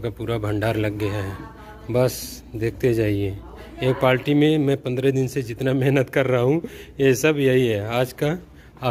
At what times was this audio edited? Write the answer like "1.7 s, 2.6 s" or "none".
none